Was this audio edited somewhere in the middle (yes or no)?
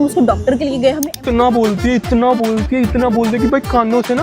yes